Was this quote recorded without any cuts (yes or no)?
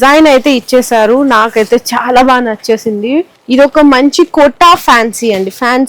no